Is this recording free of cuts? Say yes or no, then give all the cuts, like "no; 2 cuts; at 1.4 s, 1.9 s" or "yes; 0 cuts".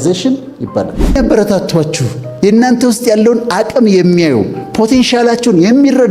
no; 1 cut; at 1.2 s